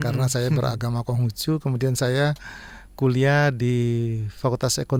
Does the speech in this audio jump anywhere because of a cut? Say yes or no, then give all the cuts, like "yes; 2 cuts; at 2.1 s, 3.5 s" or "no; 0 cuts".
no; 0 cuts